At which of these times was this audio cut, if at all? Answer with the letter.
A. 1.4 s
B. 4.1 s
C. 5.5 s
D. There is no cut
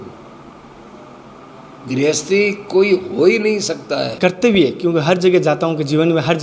B